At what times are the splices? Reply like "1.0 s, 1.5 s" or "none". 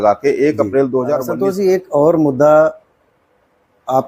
1.3 s

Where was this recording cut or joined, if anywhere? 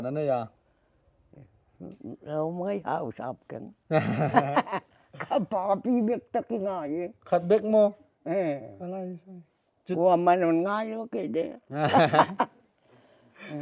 none

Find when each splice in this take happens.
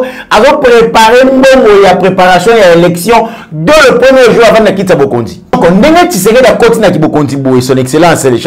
5.5 s

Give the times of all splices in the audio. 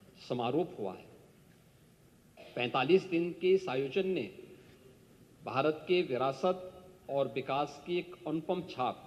none

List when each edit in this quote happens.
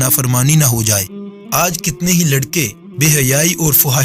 1.6 s, 2.8 s

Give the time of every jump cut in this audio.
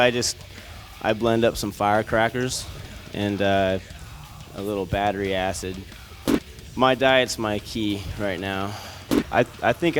9.1 s

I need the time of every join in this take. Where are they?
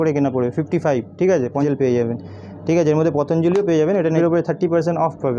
1.6 s, 4.1 s

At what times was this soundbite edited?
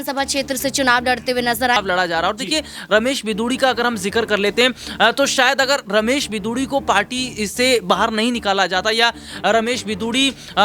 1.8 s

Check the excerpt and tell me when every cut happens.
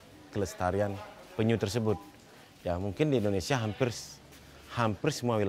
none

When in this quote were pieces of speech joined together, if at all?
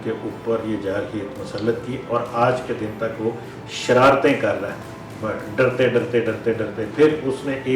none

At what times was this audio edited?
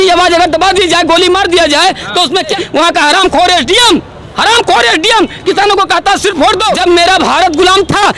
2.5 s, 6.7 s

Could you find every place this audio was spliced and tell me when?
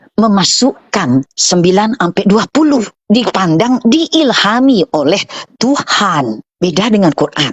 1.4 s, 2.9 s, 6.5 s

